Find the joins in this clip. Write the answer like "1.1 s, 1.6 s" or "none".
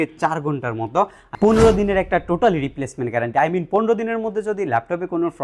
1.2 s